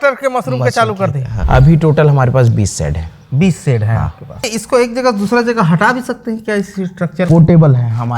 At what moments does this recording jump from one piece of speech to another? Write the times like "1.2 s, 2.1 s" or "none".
1.3 s, 4.5 s